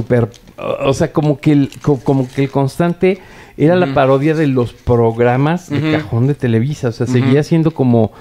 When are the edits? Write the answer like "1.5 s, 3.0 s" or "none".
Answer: none